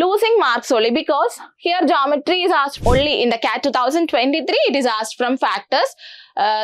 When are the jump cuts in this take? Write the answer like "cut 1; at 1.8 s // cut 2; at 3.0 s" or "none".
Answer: cut 1; at 2.8 s